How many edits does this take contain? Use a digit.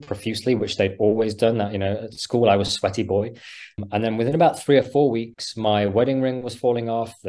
1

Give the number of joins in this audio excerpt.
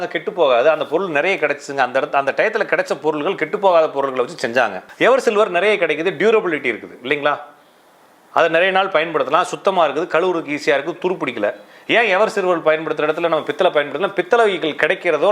1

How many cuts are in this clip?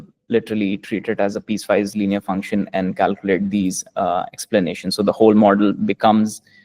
1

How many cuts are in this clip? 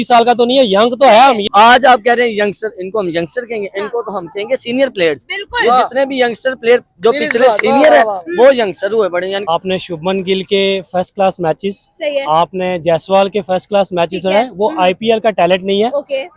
2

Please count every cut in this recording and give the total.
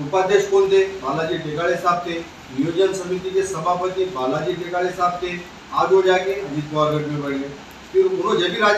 0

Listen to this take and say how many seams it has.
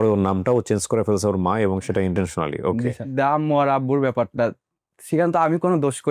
1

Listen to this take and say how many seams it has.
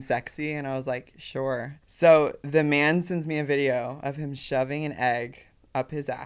1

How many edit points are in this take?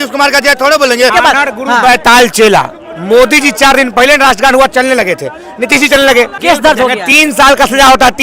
2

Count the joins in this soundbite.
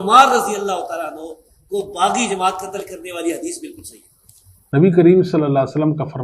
1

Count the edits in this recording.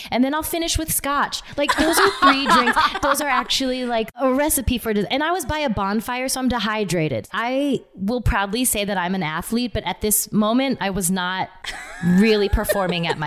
2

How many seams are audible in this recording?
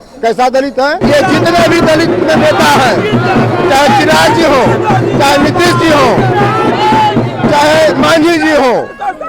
1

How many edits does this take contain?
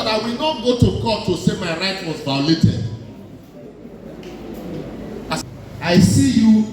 1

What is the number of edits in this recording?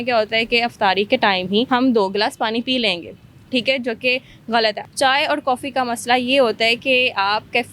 2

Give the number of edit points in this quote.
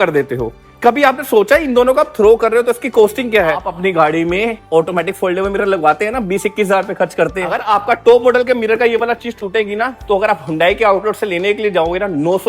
2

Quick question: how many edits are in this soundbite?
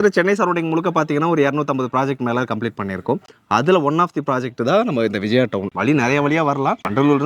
0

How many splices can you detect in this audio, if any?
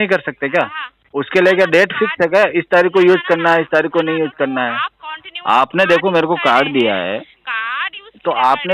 0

